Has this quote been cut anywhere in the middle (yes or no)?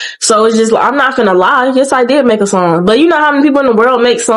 no